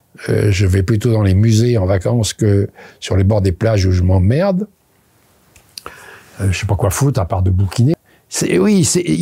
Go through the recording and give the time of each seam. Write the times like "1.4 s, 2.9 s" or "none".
7.9 s

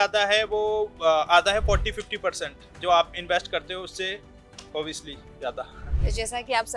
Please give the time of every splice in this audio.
none

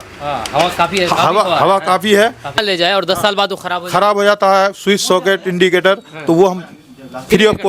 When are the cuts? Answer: 2.6 s

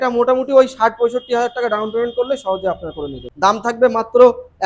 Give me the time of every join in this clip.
3.2 s

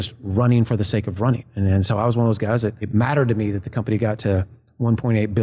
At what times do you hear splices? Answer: 2.8 s

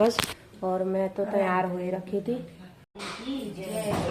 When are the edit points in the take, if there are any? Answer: 2.9 s

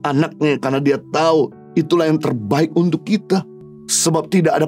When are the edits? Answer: none

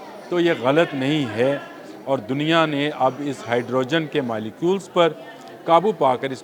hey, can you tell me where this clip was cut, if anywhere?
none

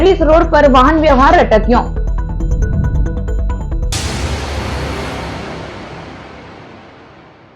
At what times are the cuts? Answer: 3.9 s

